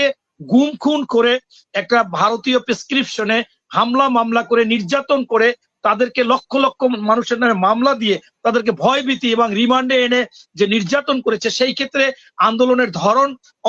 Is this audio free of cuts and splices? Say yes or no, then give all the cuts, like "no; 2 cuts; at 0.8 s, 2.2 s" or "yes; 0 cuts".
yes; 0 cuts